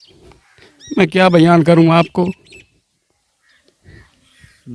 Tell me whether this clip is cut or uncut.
uncut